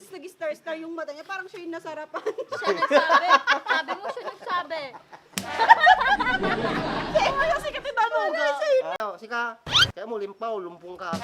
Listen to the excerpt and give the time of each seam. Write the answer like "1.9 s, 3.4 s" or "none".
9.0 s